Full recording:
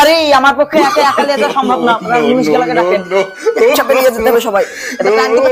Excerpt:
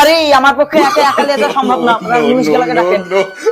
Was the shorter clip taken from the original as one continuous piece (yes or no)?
yes